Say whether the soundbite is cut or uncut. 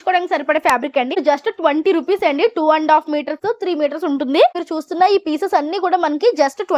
cut